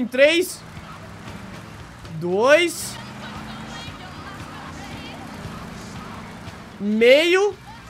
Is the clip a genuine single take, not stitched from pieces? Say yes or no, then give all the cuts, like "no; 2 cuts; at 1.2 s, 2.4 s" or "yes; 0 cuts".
yes; 0 cuts